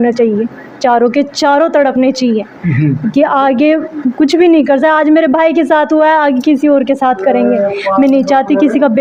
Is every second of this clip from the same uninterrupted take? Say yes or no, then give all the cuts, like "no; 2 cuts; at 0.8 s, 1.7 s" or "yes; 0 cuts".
yes; 0 cuts